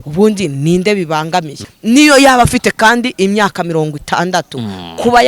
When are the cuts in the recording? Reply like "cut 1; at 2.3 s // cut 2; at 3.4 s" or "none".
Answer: cut 1; at 1.6 s